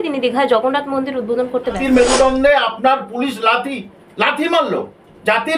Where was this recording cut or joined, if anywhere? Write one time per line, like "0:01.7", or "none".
0:01.8